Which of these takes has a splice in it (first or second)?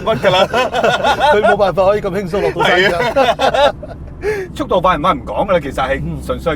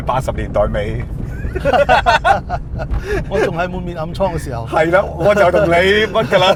first